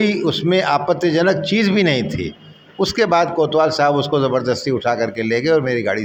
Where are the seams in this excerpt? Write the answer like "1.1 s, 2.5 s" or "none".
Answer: none